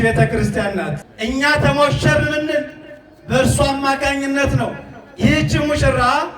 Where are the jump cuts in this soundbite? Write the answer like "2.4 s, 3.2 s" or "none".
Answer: 1.0 s